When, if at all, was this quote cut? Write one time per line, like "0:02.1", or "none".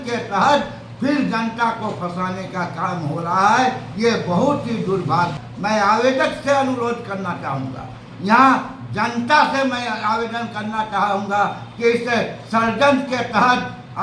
0:05.4